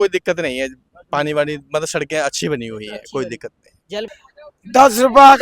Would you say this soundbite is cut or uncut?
cut